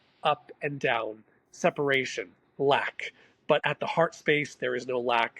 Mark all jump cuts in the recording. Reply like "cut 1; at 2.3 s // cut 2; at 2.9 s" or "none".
cut 1; at 3.7 s